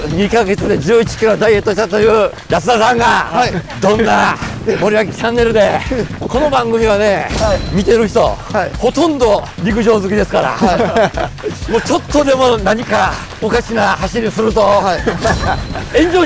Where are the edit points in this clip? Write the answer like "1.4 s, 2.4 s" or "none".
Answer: 2.4 s, 3.7 s, 4.5 s, 6.1 s, 7.7 s, 8.7 s, 9.5 s, 13.3 s